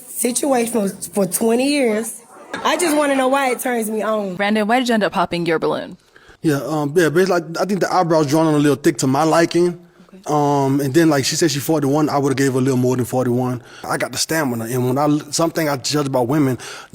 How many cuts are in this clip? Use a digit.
3